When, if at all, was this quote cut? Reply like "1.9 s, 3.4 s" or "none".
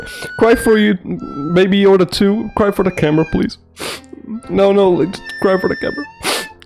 none